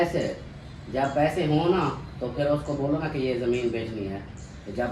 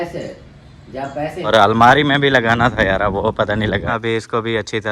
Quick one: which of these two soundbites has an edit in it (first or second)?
second